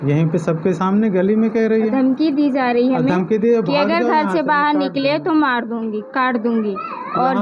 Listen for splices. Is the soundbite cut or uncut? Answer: uncut